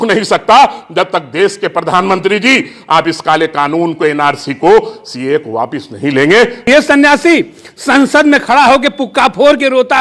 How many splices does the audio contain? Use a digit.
1